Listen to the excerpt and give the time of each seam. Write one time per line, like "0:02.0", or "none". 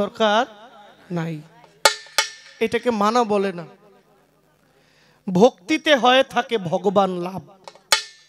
none